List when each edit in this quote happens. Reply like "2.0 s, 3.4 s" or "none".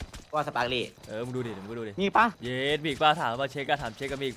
1.0 s, 2.4 s